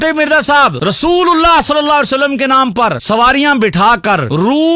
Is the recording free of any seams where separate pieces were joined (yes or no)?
yes